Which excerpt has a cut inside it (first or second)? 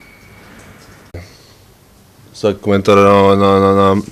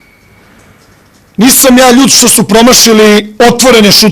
second